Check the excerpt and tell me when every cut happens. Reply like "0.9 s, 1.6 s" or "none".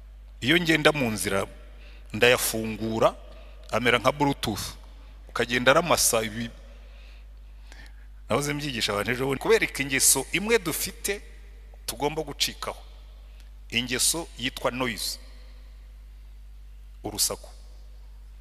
9.4 s